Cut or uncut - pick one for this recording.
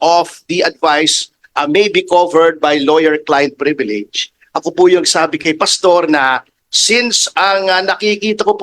uncut